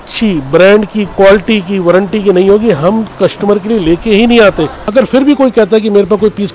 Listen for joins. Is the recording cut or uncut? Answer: cut